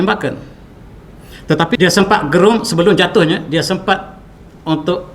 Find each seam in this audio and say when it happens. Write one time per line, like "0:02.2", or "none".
0:01.8